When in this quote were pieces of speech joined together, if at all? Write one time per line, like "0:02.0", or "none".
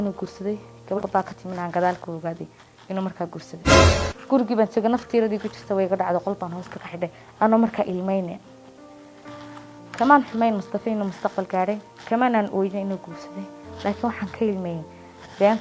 0:01.0